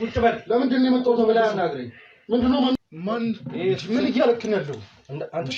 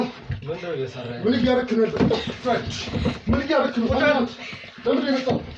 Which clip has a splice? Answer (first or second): first